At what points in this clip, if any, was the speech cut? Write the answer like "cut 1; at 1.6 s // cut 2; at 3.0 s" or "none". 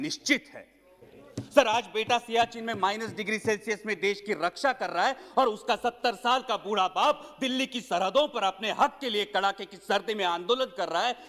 cut 1; at 1.1 s